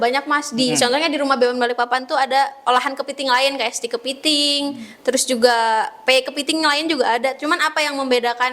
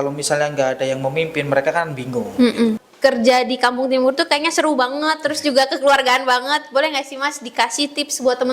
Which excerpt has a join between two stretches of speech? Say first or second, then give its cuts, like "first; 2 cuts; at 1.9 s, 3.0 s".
second; 1 cut; at 2.8 s